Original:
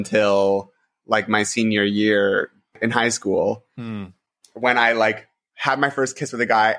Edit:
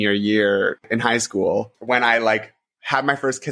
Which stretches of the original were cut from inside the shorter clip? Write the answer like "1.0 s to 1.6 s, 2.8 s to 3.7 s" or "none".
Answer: 2.5 s to 2.7 s, 3.7 s to 4.5 s